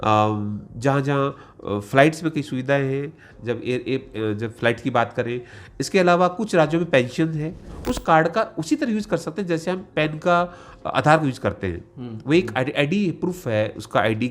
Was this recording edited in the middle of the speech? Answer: yes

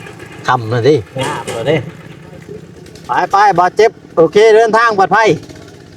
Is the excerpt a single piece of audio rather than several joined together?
no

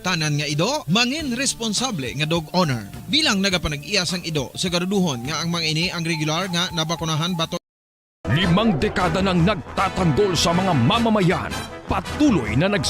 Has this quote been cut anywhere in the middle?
yes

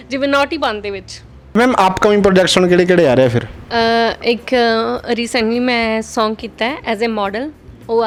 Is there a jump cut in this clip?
no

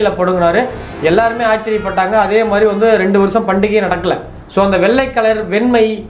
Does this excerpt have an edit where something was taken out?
yes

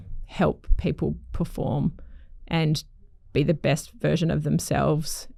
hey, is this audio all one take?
yes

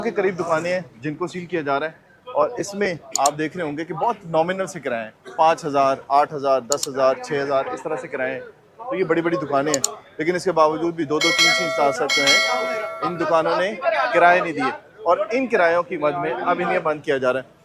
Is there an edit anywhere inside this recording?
no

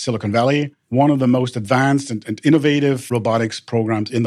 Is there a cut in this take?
yes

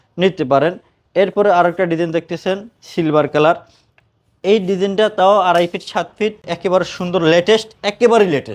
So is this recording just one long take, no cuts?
no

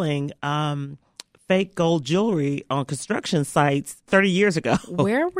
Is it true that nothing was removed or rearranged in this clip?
no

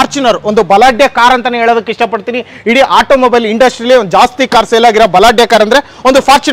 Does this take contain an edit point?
no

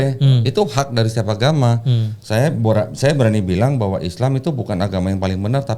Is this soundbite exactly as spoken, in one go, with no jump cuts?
yes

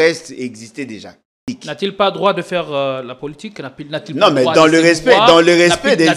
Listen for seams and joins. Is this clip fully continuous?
no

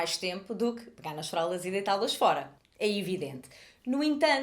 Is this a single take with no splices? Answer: no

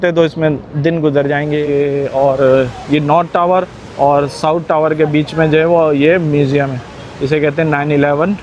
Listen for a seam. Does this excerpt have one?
yes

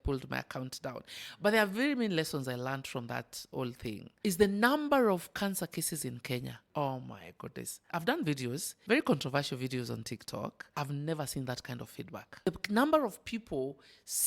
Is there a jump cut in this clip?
yes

